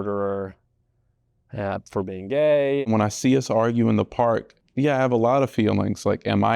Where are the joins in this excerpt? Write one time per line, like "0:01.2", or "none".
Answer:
0:02.8
0:04.6

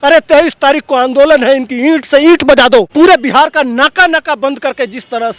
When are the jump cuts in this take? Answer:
0:02.9

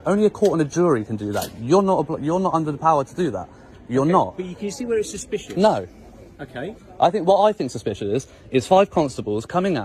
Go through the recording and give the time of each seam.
none

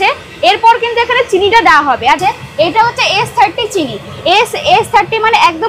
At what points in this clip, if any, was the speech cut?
0:02.2

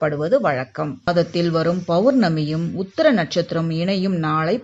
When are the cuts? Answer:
0:01.0

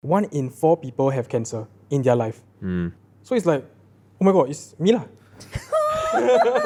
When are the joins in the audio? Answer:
none

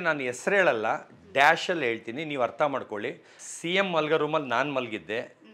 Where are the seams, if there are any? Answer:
0:03.4

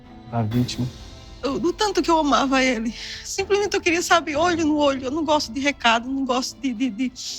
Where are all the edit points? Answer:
0:01.0

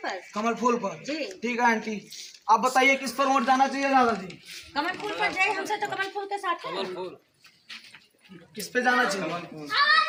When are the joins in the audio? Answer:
none

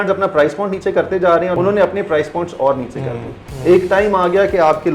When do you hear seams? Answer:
0:01.5

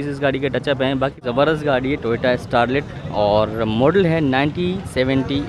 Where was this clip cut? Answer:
0:01.2

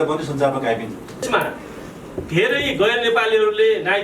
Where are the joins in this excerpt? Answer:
0:01.3

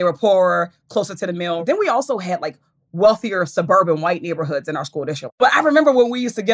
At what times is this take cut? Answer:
0:01.6
0:05.4

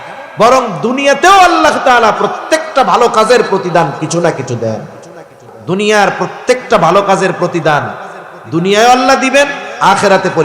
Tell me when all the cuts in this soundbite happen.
0:05.5

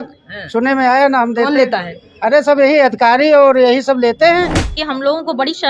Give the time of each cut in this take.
0:04.8

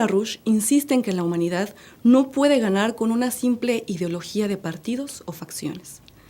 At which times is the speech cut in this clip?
none

